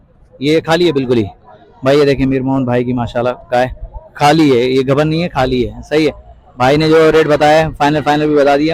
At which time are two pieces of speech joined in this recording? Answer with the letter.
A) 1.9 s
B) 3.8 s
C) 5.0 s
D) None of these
D